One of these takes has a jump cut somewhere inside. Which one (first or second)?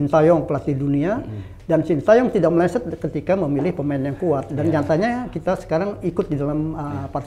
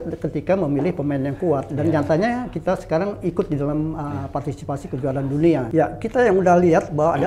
second